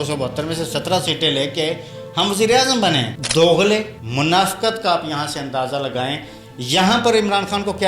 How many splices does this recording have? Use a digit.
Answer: 2